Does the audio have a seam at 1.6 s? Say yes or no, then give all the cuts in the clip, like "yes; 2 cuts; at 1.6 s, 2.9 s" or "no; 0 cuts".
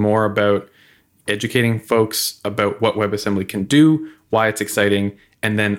no; 0 cuts